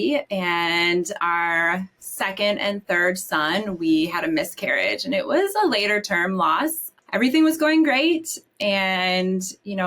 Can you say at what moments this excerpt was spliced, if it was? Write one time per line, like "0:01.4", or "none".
0:01.2
0:06.9